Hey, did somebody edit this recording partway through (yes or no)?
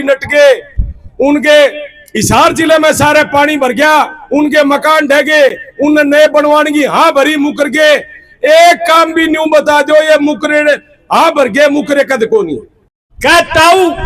yes